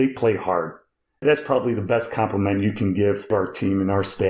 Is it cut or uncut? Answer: cut